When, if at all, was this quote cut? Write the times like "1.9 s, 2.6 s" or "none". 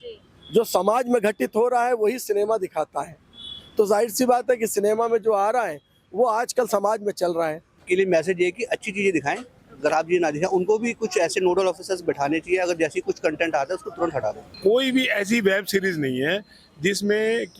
7.8 s, 14.5 s